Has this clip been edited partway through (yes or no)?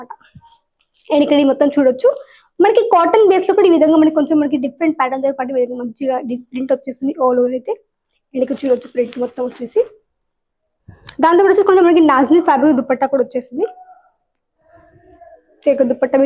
no